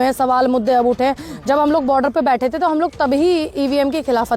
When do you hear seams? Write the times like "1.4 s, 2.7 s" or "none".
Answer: none